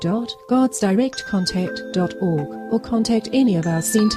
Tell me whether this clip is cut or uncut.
uncut